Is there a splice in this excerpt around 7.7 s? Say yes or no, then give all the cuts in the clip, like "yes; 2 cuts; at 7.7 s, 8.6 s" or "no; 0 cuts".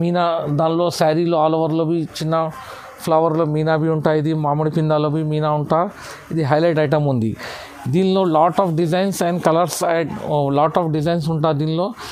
no; 0 cuts